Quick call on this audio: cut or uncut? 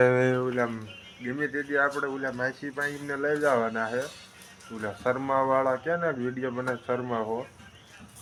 uncut